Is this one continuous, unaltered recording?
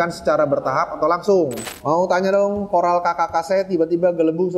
no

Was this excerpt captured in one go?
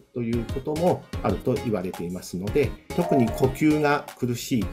no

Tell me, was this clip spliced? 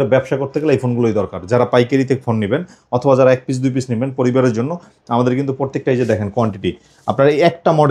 no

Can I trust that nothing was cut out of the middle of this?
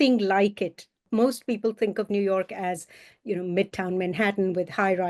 no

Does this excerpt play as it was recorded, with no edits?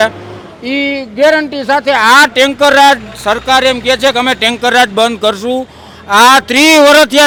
yes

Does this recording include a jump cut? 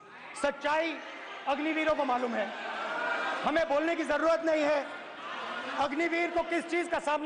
no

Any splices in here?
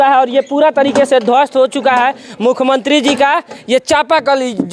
no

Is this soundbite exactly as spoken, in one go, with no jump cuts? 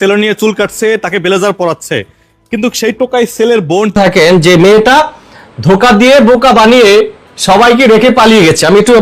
no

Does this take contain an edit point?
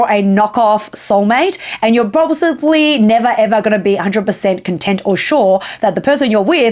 no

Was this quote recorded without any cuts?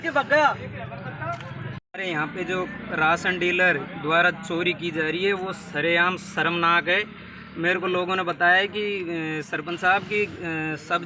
no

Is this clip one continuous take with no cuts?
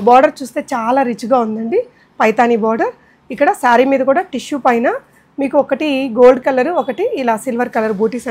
yes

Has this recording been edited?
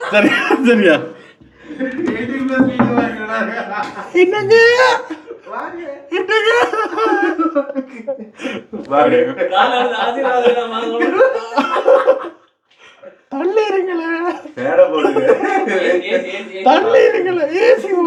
no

